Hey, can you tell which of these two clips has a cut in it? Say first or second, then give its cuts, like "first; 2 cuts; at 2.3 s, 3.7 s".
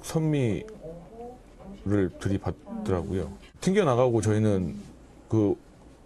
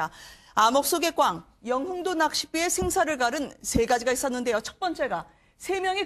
first; 1 cut; at 3.6 s